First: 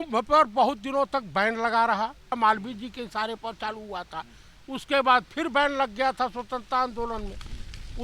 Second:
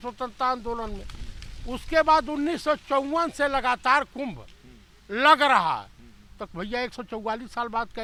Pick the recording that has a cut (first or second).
first